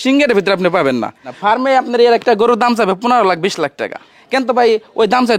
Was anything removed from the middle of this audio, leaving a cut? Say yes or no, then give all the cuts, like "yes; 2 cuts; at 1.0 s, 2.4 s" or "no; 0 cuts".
yes; 2 cuts; at 1.3 s, 4.2 s